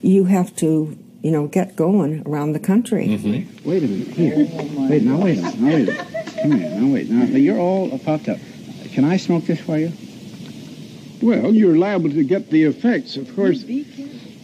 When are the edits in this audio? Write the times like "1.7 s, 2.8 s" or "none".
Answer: 3.0 s